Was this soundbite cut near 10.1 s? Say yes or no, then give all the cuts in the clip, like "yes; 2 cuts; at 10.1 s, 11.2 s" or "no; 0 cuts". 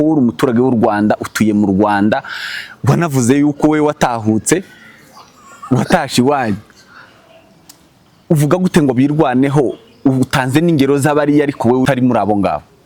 no; 1 cut; at 11.9 s